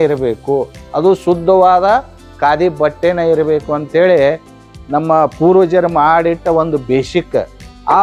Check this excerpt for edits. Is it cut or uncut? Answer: uncut